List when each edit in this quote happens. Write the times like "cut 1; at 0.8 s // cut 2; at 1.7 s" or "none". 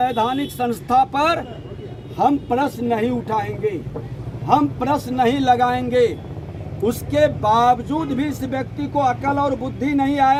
none

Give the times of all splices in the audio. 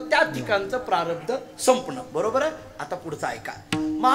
none

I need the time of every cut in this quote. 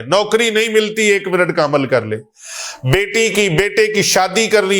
none

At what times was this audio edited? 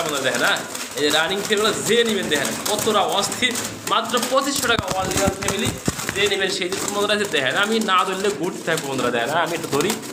none

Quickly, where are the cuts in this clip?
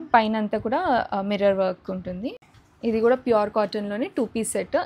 cut 1; at 2.4 s

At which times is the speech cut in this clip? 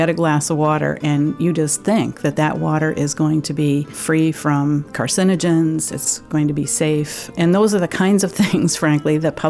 cut 1; at 4.0 s // cut 2; at 5.0 s // cut 3; at 6.0 s // cut 4; at 7.3 s

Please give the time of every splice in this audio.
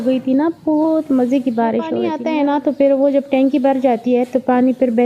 cut 1; at 2.1 s

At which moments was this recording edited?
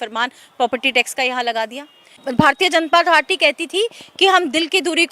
cut 1; at 2.2 s

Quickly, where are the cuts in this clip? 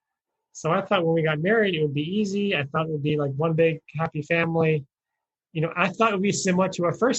none

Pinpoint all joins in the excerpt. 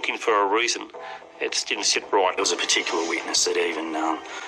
cut 1; at 2.4 s

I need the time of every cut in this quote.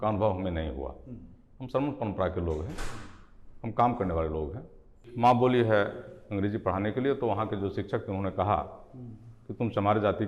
cut 1; at 5.1 s

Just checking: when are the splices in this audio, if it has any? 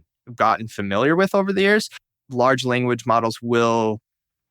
cut 1; at 2.0 s

